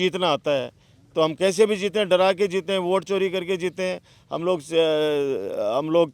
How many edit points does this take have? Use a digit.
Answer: 0